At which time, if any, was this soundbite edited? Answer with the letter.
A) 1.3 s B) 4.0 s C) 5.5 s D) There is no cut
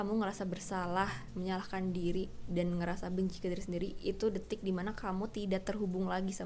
D